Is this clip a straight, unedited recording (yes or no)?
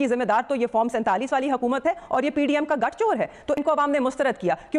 no